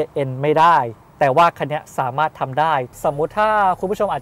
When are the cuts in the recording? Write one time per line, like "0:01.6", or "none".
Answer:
0:02.9